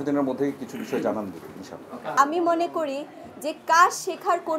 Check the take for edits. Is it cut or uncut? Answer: cut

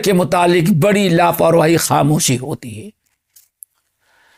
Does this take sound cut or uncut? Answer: uncut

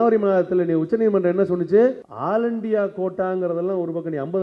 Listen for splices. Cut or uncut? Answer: cut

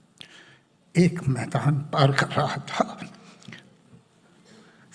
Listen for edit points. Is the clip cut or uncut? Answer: uncut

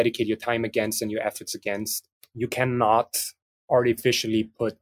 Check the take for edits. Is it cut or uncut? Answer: cut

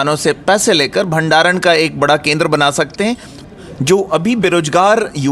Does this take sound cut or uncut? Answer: cut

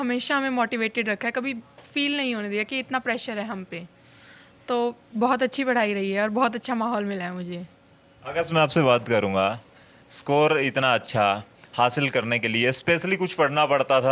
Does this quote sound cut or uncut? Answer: uncut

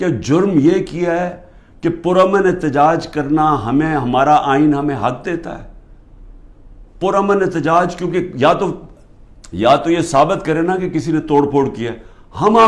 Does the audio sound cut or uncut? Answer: uncut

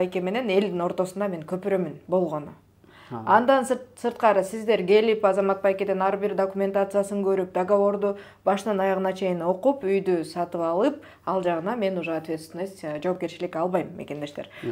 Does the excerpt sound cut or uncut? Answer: uncut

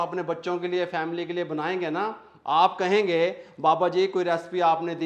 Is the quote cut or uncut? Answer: uncut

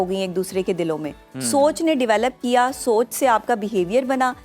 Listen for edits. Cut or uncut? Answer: uncut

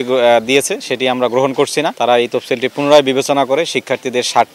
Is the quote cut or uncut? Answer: cut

